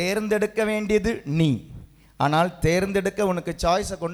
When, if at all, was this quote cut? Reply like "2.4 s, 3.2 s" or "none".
none